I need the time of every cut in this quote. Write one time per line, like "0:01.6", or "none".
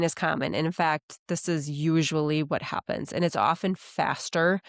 none